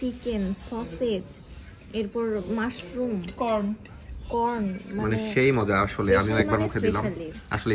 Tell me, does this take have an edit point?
no; 0 cuts

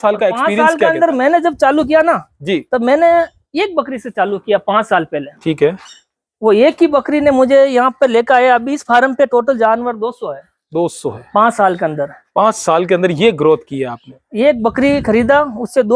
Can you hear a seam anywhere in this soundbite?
no; 0 cuts

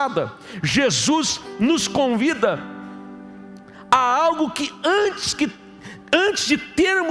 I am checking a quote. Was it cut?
no; 0 cuts

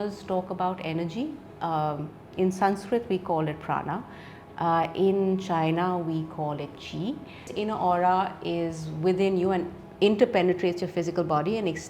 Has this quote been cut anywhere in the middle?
yes; 1 cut; at 7.5 s

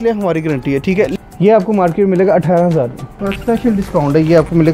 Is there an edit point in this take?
yes; 2 cuts; at 1.1 s, 3.3 s

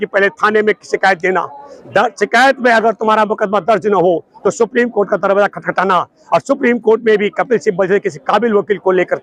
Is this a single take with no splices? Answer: yes; 0 cuts

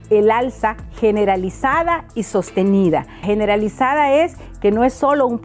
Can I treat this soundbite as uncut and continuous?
no; 1 cut; at 3.2 s

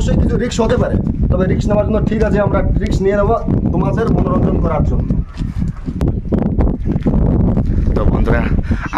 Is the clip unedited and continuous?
yes; 0 cuts

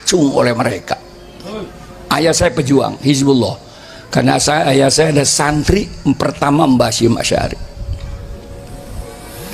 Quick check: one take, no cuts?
yes; 0 cuts

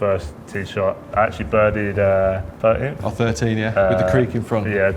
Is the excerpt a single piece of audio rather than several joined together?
no; 2 cuts; at 1.0 s, 2.5 s

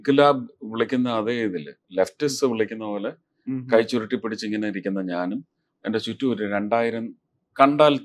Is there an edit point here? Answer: no; 0 cuts

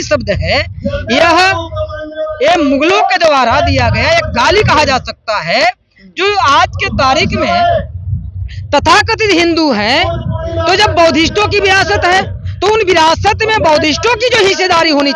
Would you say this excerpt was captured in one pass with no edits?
yes; 0 cuts

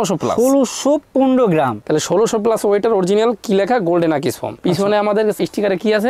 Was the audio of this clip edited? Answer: no; 0 cuts

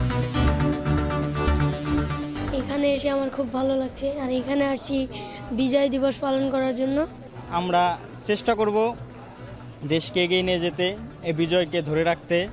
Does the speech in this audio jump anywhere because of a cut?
yes; 1 cut; at 1.1 s

